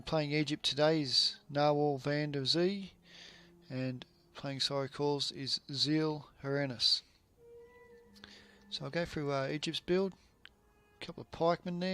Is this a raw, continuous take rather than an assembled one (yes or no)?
yes